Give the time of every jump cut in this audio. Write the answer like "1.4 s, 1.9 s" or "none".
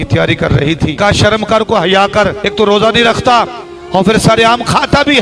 1.0 s, 2.4 s

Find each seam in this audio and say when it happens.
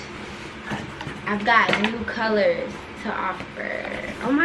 none

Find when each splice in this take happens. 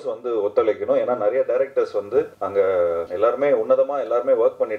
2.4 s, 3.1 s

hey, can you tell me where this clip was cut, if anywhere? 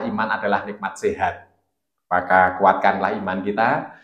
none

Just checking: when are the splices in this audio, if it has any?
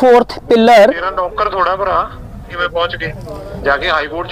2.5 s

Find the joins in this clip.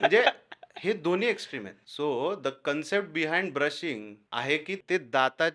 1.8 s, 4.3 s

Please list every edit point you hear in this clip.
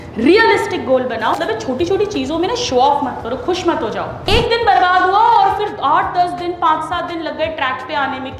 1.4 s, 4.3 s

